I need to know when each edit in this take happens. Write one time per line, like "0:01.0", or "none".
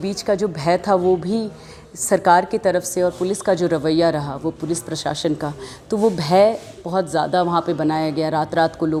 none